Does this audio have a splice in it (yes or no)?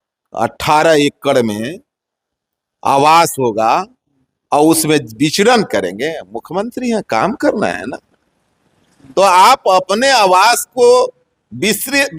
no